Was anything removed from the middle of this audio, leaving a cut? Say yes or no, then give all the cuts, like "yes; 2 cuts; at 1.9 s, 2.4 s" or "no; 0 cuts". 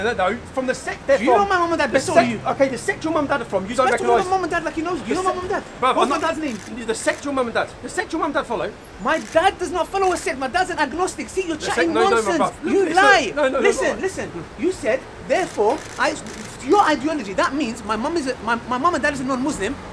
no; 0 cuts